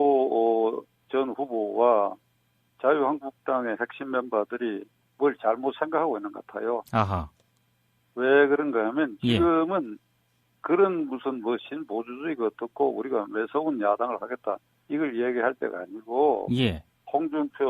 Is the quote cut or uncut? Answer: cut